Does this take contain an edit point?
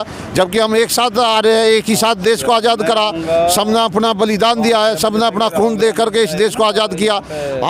no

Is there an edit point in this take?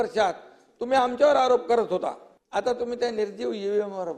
yes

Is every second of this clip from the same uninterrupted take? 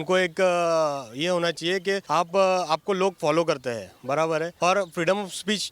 no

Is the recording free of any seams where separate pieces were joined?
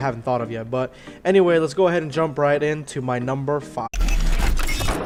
yes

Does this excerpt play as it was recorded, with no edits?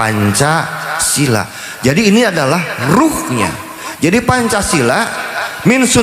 yes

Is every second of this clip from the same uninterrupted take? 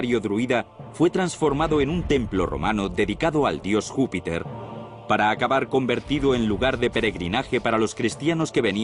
no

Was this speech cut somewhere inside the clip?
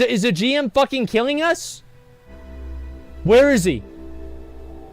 yes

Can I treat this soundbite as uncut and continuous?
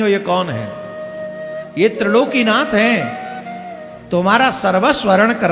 yes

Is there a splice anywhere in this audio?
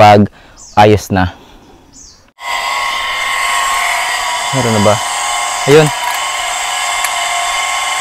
yes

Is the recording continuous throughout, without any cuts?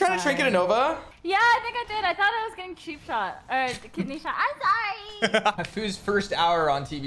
no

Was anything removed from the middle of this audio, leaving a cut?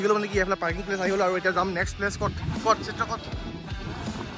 no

